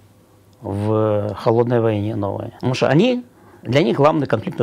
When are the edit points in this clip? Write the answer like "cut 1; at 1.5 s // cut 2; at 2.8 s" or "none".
cut 1; at 2.5 s